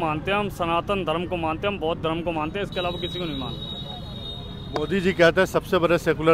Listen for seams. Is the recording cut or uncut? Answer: uncut